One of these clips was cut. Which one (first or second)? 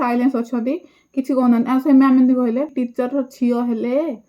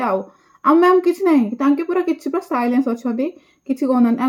first